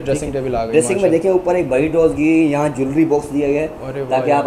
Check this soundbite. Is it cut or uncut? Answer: uncut